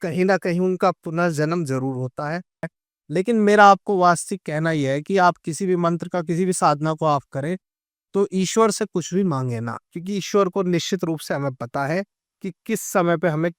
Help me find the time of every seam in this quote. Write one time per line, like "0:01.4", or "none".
0:02.8

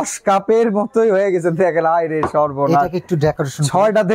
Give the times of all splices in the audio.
none

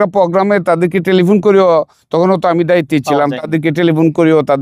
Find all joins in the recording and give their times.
none

